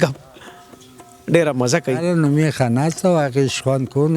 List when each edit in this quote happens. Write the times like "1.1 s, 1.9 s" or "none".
2.0 s